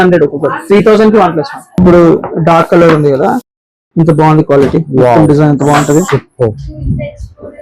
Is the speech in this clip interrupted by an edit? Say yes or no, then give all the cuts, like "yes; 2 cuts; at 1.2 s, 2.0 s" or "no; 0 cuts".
yes; 1 cut; at 1.8 s